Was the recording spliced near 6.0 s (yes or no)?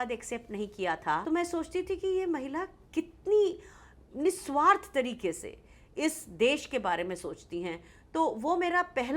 no